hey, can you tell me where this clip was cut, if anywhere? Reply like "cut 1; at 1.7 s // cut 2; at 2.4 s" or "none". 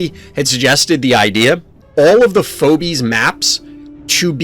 cut 1; at 1.8 s